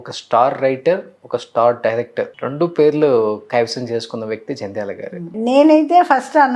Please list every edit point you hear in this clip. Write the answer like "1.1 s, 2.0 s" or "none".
2.4 s, 5.3 s